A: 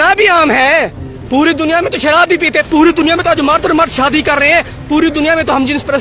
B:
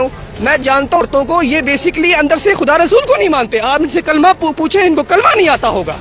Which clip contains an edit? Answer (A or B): B